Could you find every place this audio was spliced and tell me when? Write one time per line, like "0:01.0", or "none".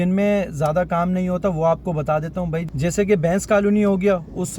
none